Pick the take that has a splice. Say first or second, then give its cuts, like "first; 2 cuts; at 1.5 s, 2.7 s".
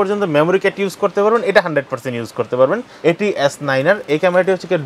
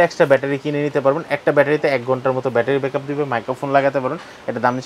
first; 1 cut; at 2.9 s